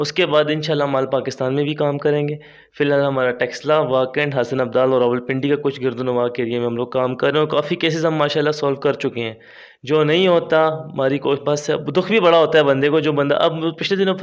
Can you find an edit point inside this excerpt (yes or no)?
no